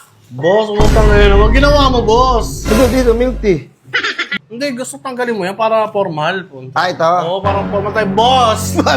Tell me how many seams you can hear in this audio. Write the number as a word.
one